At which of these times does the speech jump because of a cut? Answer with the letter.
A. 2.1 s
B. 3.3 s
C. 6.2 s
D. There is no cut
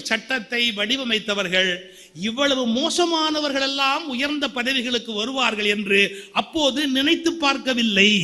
D